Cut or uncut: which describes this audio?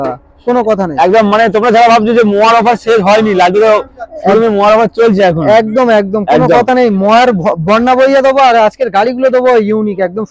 uncut